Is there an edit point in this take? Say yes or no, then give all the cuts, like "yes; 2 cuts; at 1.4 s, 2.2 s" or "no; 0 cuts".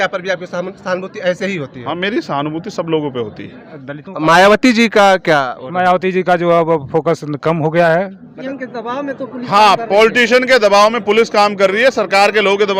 yes; 2 cuts; at 3.8 s, 8.3 s